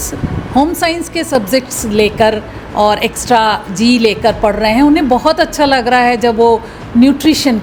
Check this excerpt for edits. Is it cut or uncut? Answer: uncut